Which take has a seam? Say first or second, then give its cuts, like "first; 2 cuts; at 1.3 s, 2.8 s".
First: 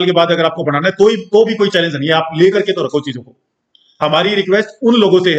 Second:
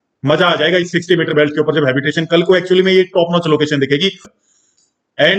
second; 1 cut; at 4.2 s